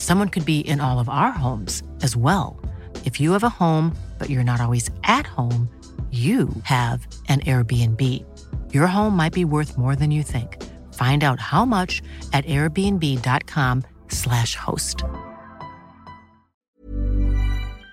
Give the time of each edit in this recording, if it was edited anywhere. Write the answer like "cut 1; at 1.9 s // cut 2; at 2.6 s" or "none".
cut 1; at 16.6 s